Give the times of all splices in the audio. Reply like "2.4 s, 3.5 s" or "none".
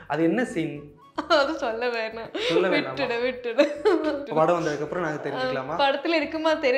4.2 s